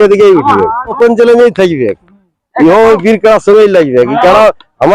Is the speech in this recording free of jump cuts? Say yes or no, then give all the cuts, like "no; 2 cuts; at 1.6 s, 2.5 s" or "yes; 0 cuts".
no; 1 cut; at 0.9 s